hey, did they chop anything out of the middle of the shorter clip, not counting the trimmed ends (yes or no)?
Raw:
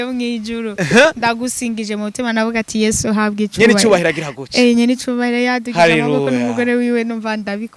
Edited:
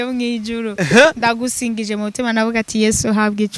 no